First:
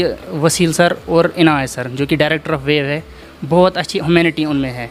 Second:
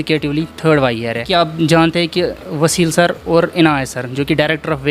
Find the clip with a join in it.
second; 1 cut; at 1.3 s

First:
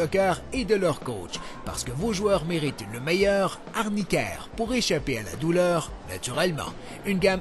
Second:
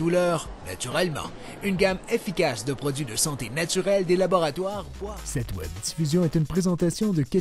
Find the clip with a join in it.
second; 1 cut; at 4.9 s

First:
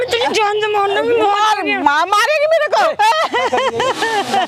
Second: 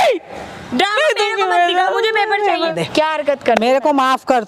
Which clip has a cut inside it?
second; 1 cut; at 2.7 s

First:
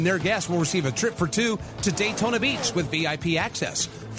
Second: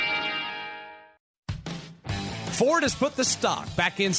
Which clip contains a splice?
second; 1 cut; at 1.2 s

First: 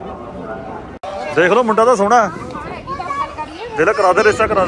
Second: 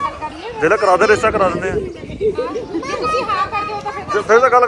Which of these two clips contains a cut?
first; 1 cut; at 1.0 s

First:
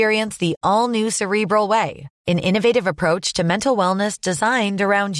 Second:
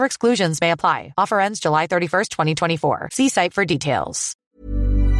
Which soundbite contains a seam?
second; 1 cut; at 4.2 s

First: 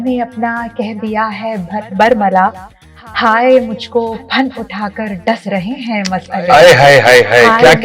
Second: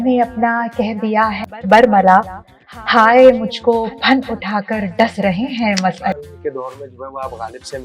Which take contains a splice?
second; 2 cuts; at 1.5 s, 6.1 s

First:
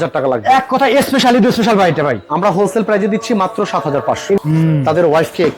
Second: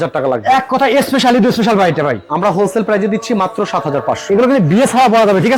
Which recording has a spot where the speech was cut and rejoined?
first; 1 cut; at 4.4 s

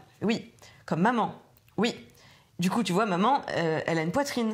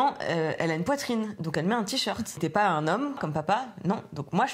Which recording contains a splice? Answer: second; 2 cuts; at 2.4 s, 3.2 s

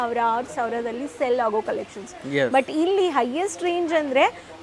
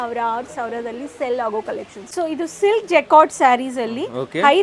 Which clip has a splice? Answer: second; 1 cut; at 2.1 s

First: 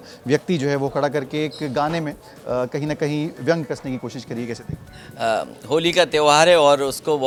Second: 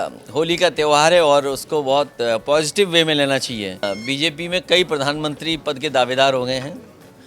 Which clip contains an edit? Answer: second; 1 cut; at 3.8 s

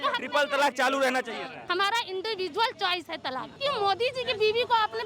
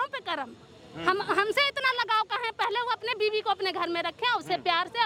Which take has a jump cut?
first; 2 cuts; at 1.5 s, 3.5 s

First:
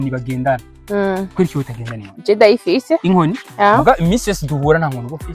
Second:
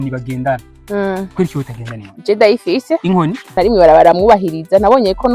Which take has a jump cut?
second; 1 cut; at 3.5 s

